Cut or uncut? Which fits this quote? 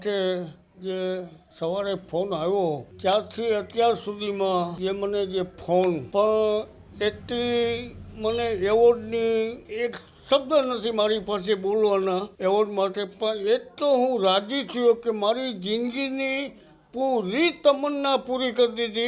cut